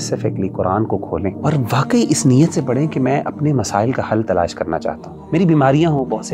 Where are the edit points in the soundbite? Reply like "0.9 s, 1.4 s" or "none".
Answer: 1.4 s, 5.1 s